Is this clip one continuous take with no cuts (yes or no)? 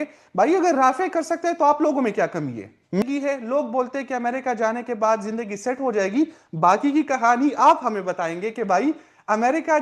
no